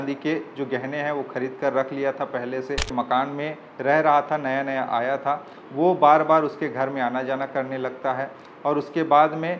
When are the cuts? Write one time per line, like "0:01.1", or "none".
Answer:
0:02.9